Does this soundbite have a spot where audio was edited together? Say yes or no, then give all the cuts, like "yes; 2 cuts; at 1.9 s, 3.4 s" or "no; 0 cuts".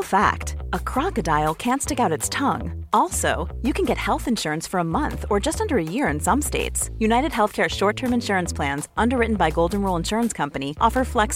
no; 0 cuts